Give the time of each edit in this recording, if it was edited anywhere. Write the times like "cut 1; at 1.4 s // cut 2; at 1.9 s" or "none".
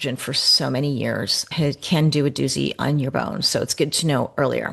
none